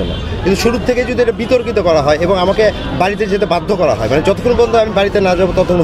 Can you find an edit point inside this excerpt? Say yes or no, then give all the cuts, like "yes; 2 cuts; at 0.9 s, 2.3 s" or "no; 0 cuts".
no; 0 cuts